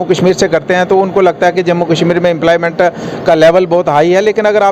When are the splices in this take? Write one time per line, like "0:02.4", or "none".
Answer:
none